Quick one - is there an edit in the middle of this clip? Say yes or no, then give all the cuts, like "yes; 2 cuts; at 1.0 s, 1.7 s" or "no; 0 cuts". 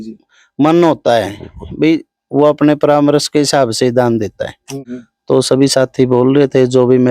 no; 0 cuts